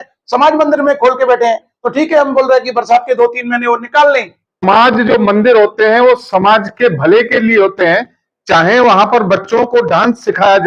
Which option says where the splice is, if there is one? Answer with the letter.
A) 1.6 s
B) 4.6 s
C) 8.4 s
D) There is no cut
B